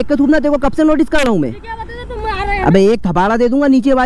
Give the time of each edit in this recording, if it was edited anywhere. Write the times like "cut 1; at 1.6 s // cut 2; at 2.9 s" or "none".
cut 1; at 2.8 s